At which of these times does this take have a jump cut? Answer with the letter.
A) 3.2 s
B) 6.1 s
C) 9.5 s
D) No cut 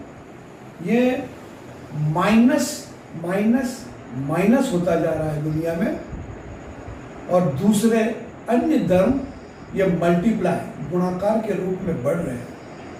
D